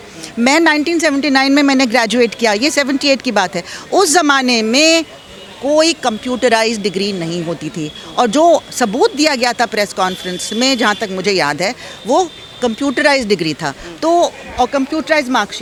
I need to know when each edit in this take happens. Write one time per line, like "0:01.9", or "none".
none